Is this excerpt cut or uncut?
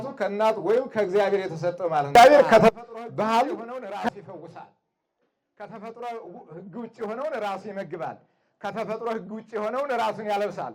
cut